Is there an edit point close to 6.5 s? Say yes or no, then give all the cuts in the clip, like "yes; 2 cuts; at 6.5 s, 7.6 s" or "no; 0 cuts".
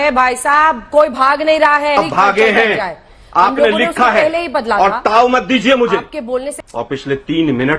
yes; 2 cuts; at 2.0 s, 6.5 s